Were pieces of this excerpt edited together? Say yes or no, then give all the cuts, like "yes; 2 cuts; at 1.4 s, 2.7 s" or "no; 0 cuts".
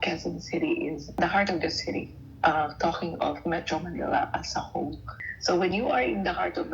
yes; 2 cuts; at 1.0 s, 5.1 s